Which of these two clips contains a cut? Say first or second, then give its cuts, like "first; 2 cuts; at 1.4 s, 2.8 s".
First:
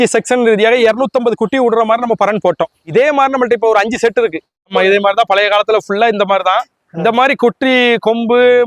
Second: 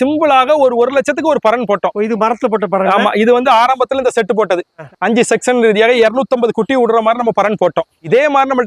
first; 1 cut; at 4.7 s